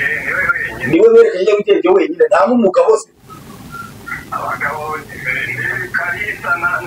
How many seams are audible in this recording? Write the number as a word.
zero